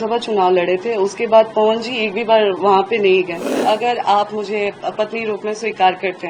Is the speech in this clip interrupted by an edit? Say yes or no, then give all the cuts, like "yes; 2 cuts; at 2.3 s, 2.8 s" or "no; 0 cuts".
yes; 1 cut; at 3.5 s